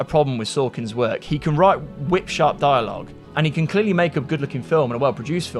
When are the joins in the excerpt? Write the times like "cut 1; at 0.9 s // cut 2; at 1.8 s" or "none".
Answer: cut 1; at 3.2 s